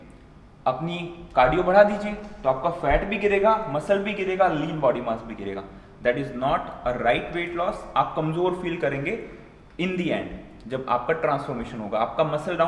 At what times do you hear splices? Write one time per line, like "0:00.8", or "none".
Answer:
none